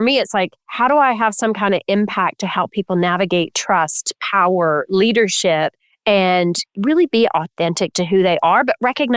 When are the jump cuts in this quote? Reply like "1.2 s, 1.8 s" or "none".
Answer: 5.9 s

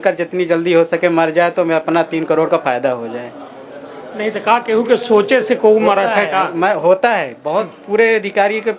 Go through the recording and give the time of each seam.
none

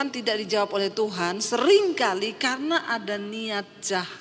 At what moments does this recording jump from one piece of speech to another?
none

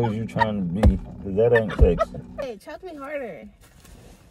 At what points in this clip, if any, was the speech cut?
2.4 s

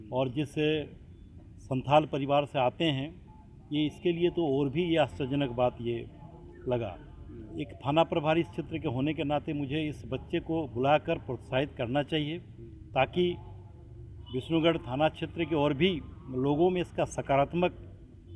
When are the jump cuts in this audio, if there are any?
7.4 s

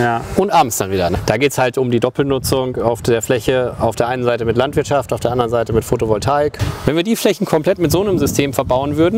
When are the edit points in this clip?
1.2 s, 6.7 s

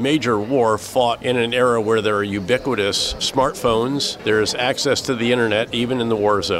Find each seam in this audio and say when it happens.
1.2 s, 3.2 s, 4.1 s

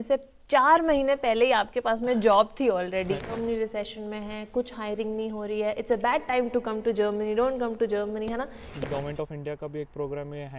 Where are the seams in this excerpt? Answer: 3.2 s, 8.7 s

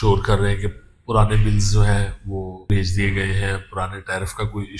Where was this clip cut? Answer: 2.7 s

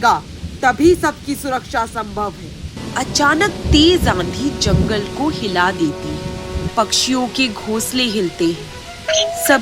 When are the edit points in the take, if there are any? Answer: 2.8 s, 6.6 s

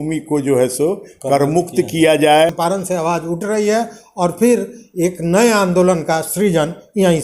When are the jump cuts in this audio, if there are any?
2.5 s

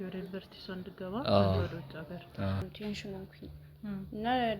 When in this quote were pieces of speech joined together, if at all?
2.7 s

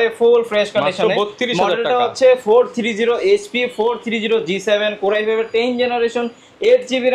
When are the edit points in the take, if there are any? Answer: none

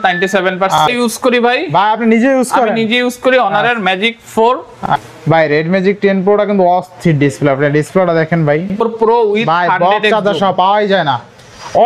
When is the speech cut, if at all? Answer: 0.8 s, 4.7 s, 8.8 s

